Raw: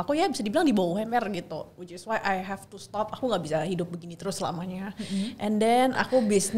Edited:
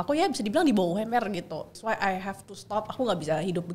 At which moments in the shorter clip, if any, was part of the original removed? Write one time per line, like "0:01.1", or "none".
0:01.7